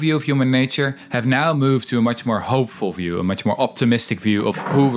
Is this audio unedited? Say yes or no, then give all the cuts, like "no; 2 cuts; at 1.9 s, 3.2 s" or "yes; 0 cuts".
yes; 0 cuts